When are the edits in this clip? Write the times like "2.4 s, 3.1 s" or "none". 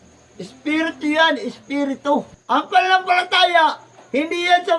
2.3 s